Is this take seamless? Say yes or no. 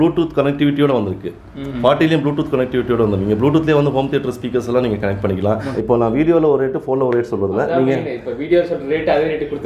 no